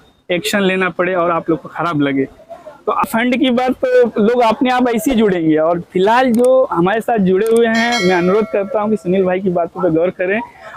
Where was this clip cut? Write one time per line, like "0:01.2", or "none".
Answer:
0:03.1

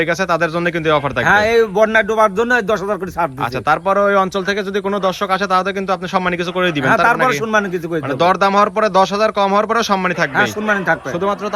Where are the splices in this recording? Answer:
none

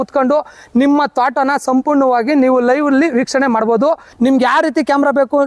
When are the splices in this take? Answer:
0:04.1

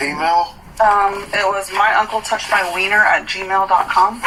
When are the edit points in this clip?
none

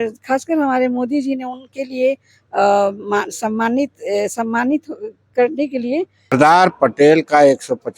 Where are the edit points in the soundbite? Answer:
0:06.3

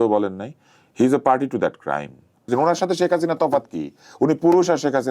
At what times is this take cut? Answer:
0:02.5

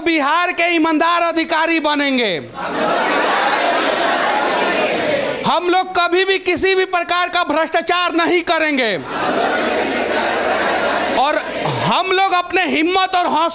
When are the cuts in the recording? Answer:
none

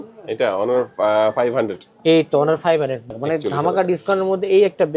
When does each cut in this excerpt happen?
0:03.0

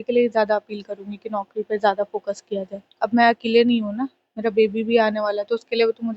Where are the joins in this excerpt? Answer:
0:02.9

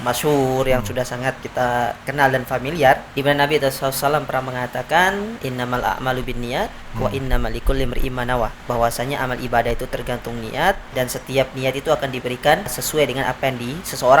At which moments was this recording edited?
0:01.4
0:03.1
0:05.4
0:08.6
0:10.9
0:12.8

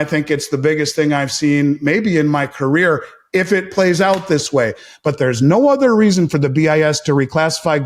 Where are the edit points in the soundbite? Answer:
none

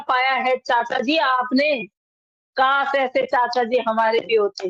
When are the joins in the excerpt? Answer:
none

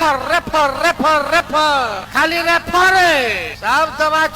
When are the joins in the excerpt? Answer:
0:02.0
0:03.5

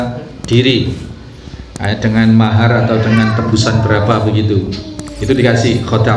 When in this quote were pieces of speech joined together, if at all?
none

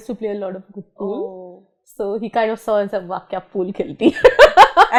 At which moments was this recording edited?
none

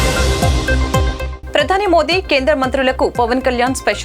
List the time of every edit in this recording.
0:01.1

